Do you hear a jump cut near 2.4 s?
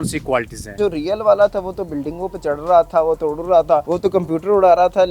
no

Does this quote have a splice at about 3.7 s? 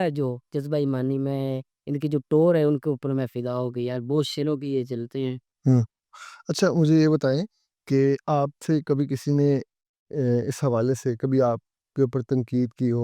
no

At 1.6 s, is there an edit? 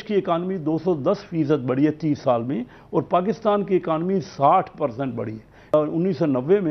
no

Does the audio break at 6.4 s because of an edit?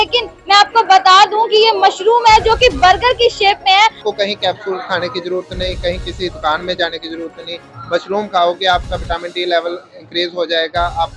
no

